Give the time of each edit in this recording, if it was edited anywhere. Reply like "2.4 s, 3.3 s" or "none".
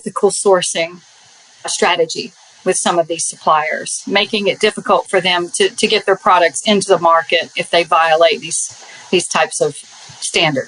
1.7 s, 9.8 s